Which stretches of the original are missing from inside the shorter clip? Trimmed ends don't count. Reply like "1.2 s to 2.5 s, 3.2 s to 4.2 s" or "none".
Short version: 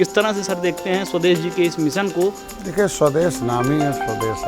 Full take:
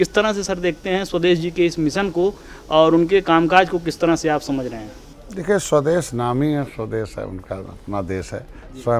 2.5 s to 5.2 s